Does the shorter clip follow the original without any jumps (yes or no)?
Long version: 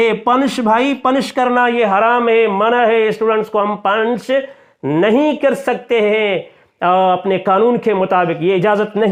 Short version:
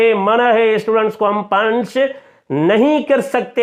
yes